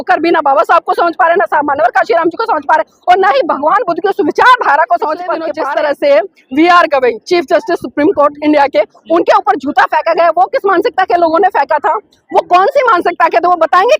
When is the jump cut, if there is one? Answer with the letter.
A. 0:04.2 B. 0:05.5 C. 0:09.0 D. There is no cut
B